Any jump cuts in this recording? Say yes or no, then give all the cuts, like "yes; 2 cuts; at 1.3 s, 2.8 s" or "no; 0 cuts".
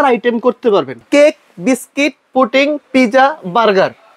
yes; 1 cut; at 1.0 s